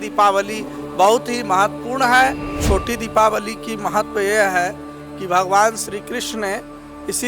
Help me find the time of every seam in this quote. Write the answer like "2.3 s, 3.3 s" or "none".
2.5 s